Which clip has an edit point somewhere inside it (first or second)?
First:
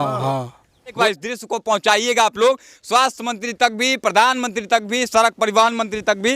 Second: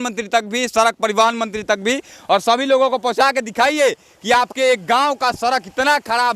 first